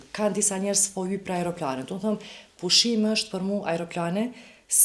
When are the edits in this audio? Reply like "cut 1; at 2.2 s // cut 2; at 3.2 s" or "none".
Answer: none